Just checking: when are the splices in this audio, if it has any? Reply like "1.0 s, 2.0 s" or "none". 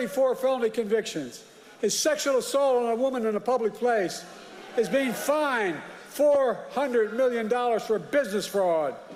none